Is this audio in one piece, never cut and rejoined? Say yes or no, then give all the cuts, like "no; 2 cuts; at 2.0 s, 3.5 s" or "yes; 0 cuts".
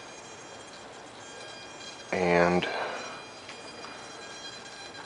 yes; 0 cuts